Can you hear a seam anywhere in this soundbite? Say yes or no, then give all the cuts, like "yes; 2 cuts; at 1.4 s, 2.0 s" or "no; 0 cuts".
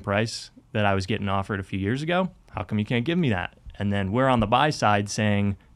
yes; 1 cut; at 2.5 s